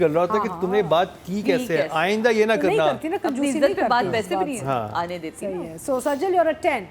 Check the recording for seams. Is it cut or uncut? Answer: uncut